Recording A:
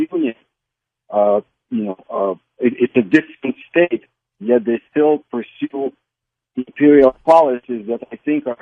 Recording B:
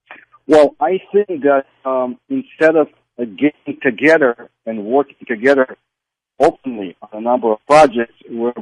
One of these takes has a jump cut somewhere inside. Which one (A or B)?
B